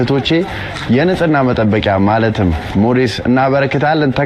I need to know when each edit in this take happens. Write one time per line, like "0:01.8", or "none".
none